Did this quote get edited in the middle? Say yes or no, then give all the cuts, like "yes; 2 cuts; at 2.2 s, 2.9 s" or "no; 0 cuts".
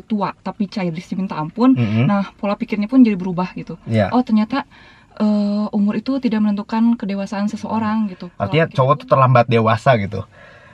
yes; 1 cut; at 8.2 s